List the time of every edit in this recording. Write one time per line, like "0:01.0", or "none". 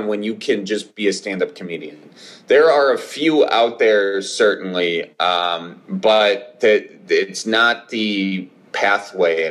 none